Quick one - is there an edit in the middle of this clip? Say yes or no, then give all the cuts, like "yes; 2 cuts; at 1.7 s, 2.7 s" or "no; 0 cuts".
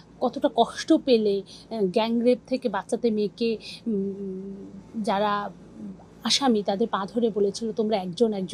no; 0 cuts